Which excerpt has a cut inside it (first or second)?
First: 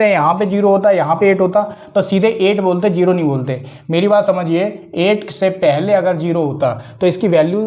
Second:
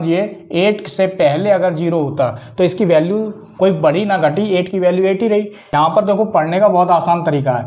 second